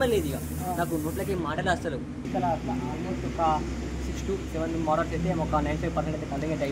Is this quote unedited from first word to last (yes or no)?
no